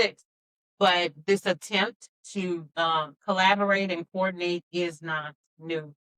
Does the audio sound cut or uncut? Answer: uncut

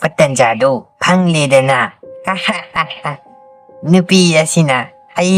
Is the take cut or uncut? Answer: uncut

